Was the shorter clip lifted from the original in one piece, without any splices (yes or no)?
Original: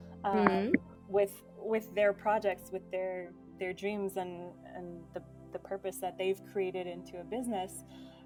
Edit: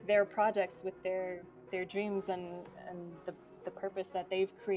yes